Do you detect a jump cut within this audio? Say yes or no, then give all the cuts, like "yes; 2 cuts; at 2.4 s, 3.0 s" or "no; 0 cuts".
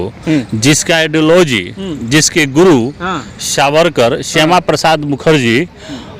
no; 0 cuts